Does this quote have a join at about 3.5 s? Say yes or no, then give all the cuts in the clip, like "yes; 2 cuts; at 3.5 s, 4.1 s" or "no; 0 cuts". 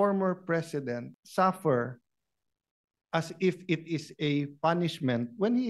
no; 1 cut; at 1.2 s